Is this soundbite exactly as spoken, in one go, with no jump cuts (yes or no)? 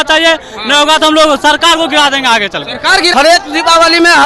no